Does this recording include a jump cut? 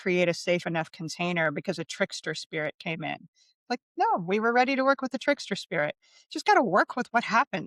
no; 0 cuts

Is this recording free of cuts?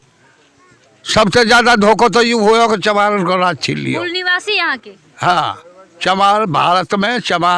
yes; 0 cuts

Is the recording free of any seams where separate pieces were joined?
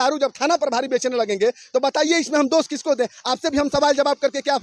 yes; 0 cuts

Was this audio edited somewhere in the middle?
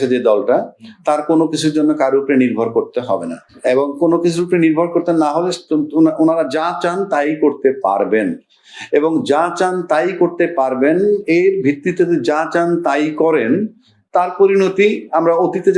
no; 0 cuts

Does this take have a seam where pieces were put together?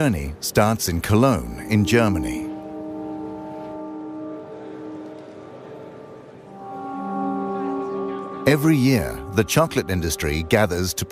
no; 0 cuts

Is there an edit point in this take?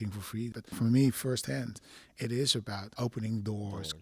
yes; 2 cuts; at 0.7 s, 2.9 s

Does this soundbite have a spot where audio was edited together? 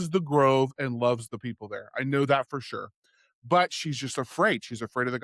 no; 0 cuts

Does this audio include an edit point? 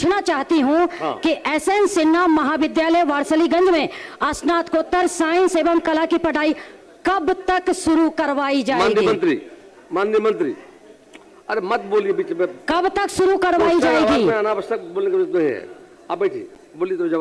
no; 0 cuts

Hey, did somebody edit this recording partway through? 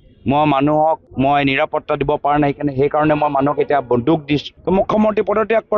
yes; 2 cuts; at 1.1 s, 4.5 s

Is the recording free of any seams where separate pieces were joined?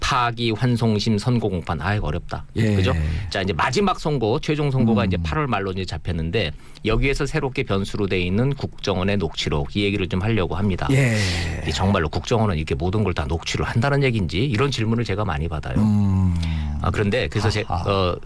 no; 1 cut; at 4.9 s

